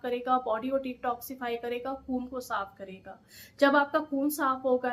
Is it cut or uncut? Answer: uncut